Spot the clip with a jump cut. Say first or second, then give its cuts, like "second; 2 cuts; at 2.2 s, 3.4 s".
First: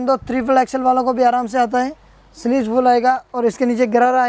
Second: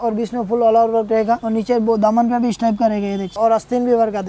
second; 2 cuts; at 1.4 s, 3.4 s